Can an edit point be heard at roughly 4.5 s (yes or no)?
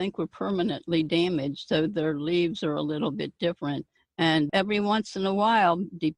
yes